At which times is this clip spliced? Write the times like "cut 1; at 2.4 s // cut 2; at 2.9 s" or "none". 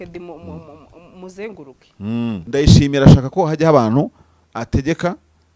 cut 1; at 2.4 s